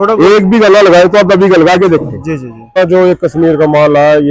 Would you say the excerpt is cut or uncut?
cut